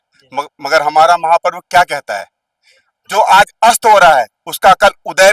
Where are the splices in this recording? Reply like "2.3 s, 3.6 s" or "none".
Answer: none